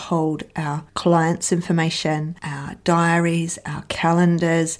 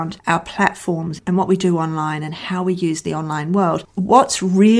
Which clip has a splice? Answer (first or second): second